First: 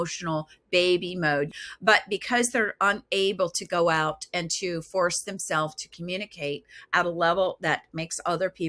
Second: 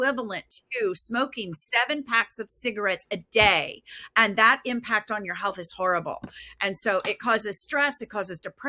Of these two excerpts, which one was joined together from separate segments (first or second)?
first